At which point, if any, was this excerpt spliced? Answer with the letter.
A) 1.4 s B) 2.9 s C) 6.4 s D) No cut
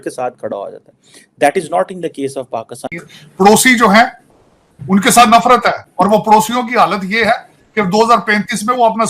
B